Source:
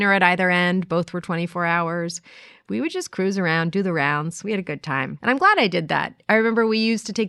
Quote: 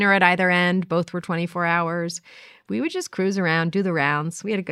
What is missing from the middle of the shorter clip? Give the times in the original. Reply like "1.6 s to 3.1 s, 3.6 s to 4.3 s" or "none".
none